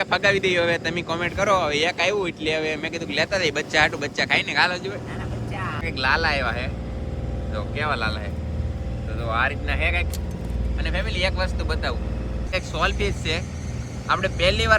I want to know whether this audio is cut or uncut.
cut